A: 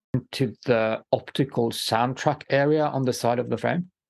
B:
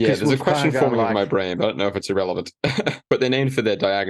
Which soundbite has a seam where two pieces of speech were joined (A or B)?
B